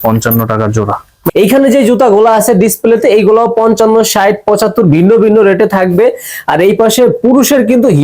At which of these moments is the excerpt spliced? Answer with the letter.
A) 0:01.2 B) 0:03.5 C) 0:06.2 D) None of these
A